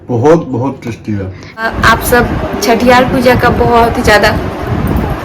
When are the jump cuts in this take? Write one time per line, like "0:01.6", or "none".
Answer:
0:01.7